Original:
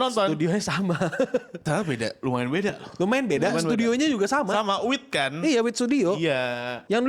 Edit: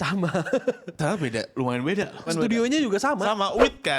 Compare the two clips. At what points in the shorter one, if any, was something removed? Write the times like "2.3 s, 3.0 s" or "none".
2.3 s